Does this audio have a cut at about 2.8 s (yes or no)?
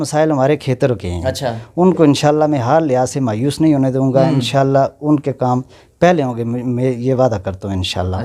no